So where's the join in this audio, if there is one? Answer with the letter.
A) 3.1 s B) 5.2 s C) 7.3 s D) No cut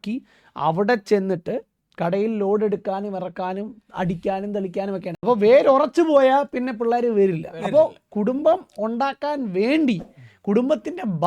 B